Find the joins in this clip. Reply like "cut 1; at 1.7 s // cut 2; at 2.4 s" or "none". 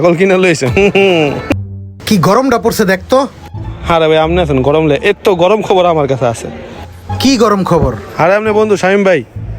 cut 1; at 1.5 s